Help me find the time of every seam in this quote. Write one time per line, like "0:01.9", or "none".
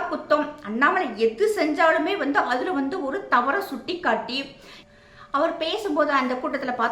0:04.9